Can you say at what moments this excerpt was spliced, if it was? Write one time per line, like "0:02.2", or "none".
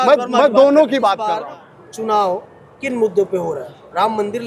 0:01.4